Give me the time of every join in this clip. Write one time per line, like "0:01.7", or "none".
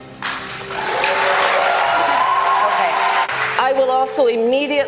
0:03.3